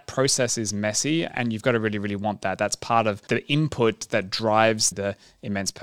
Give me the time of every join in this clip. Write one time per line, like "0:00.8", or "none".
0:01.3
0:03.2
0:04.9